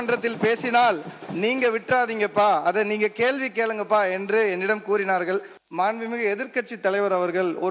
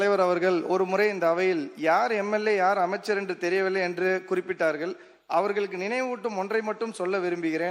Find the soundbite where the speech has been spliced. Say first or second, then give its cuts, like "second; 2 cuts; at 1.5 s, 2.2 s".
first; 1 cut; at 5.5 s